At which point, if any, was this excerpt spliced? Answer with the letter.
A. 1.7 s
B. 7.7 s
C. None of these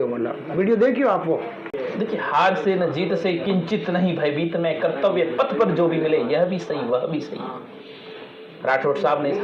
A